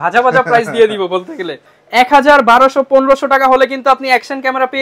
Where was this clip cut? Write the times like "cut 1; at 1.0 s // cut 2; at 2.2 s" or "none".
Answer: cut 1; at 1.8 s